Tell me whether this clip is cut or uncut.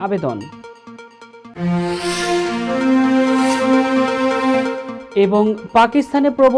uncut